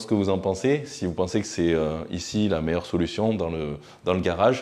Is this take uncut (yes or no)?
yes